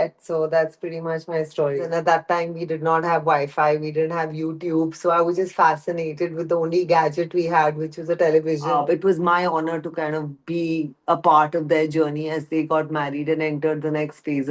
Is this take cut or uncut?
cut